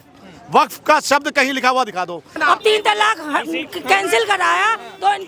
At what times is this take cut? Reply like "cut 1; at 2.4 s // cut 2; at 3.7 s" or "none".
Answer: cut 1; at 2.3 s